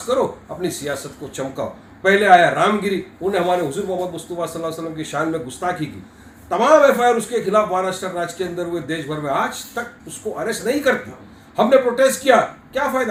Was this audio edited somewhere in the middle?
no; 0 cuts

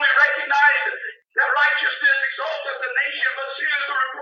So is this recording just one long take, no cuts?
yes; 0 cuts

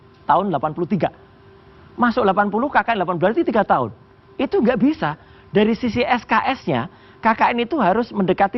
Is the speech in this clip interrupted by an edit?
no; 0 cuts

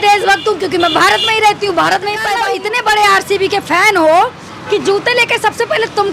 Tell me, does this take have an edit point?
yes; 1 cut; at 2.4 s

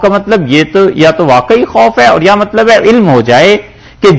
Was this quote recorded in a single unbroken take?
yes; 0 cuts

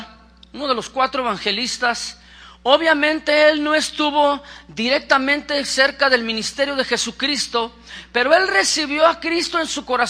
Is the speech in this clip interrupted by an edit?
no; 0 cuts

